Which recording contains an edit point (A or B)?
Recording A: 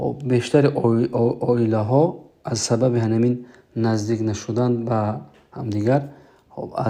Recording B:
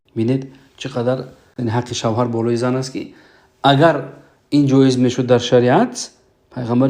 B